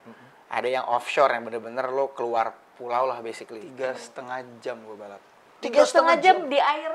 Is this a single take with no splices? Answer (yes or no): no